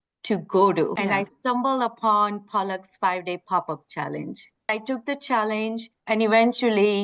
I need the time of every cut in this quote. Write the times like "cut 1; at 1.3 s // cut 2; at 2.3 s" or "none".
cut 1; at 0.9 s // cut 2; at 4.7 s // cut 3; at 5.9 s

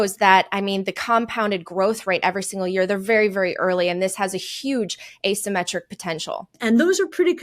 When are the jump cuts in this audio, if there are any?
cut 1; at 6.5 s

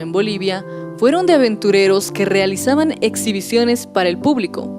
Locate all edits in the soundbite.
cut 1; at 3.9 s

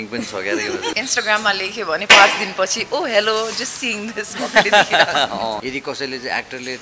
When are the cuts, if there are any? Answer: cut 1; at 0.9 s // cut 2; at 5.6 s

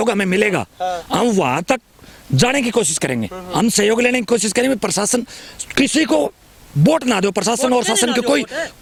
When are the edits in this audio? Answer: none

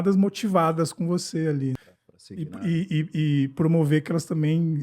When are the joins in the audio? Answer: cut 1; at 1.8 s

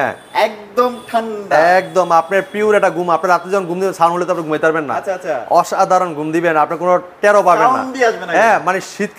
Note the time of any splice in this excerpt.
none

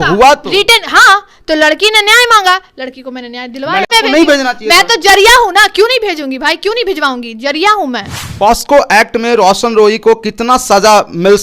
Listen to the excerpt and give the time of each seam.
cut 1; at 3.9 s // cut 2; at 8.2 s

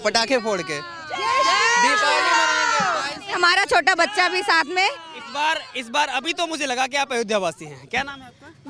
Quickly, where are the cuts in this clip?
none

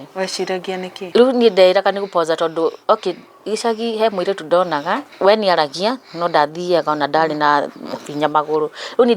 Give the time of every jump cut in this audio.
cut 1; at 1.0 s // cut 2; at 5.1 s

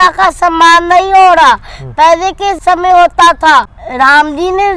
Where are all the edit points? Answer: cut 1; at 2.6 s // cut 2; at 3.8 s

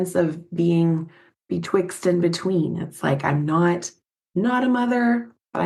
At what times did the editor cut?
none

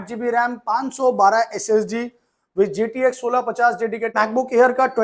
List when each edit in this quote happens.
cut 1; at 4.1 s

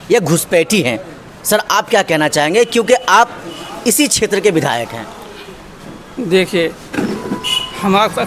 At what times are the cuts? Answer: none

